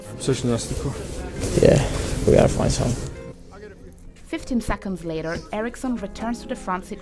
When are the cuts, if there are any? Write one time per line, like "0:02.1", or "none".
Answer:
0:03.2